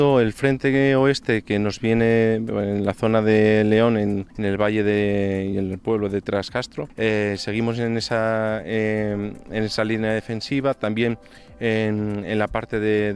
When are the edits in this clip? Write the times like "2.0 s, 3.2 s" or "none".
4.3 s, 6.8 s